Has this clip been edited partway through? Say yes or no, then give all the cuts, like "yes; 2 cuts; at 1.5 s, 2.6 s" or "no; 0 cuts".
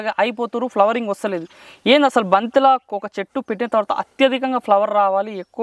no; 0 cuts